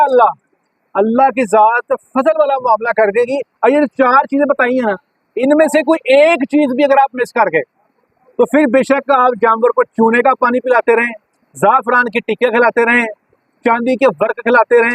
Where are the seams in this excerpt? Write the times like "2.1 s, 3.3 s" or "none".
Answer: none